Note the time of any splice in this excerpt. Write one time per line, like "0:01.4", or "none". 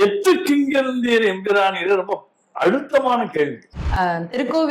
0:03.8

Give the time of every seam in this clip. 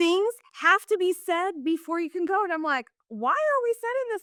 none

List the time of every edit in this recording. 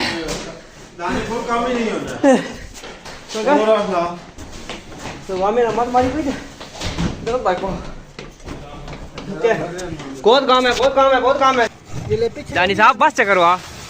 0:11.9

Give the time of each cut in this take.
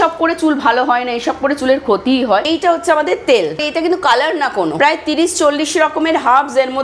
0:02.5
0:03.6
0:04.7

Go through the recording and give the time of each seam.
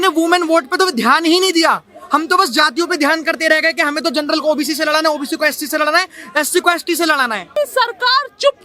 0:07.6

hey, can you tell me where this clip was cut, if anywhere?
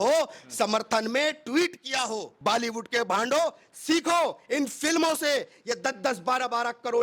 0:02.3

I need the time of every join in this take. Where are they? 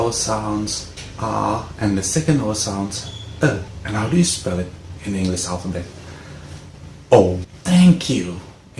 0:03.7
0:07.5

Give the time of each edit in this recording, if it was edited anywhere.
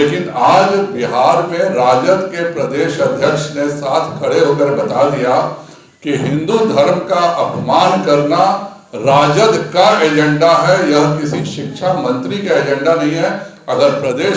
none

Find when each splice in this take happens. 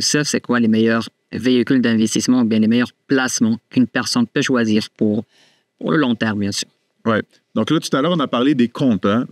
none

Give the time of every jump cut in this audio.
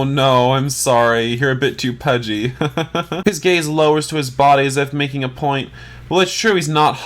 0:03.2

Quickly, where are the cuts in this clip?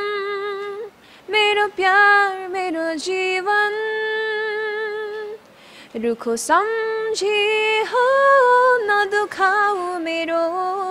none

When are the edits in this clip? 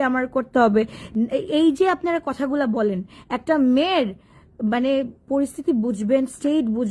none

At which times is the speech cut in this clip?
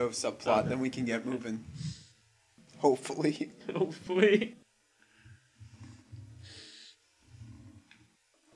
none

